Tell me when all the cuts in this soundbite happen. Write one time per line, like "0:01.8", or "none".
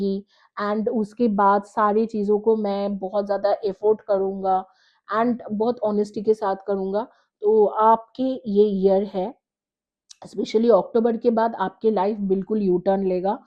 none